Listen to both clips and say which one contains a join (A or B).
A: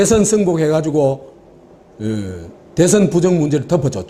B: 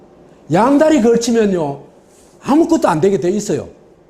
B